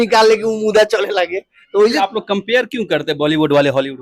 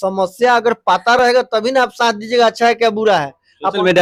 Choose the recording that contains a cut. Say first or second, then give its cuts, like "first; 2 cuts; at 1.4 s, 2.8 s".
first; 1 cut; at 2.0 s